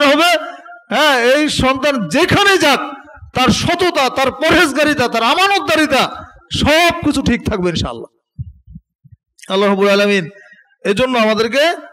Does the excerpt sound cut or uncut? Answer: uncut